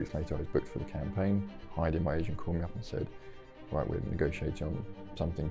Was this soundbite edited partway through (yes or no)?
yes